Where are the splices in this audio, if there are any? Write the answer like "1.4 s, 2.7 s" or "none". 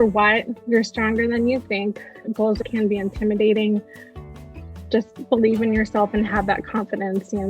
2.6 s

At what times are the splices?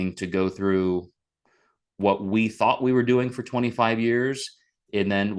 none

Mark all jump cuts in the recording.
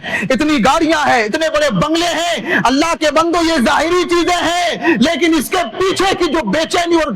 none

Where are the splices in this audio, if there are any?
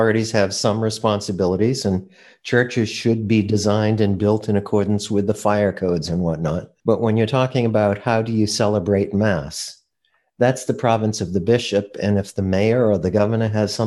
6.7 s

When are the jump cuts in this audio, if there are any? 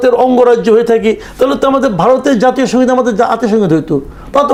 none

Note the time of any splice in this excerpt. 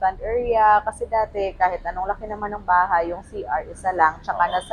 none

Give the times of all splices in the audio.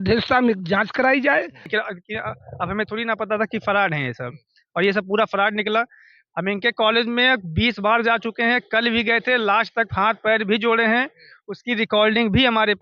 1.6 s

